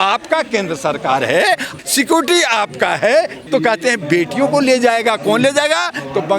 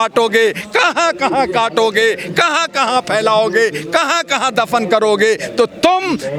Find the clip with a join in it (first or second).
first